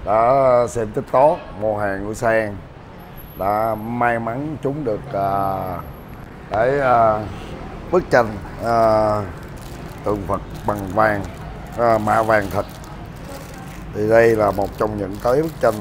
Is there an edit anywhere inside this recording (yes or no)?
no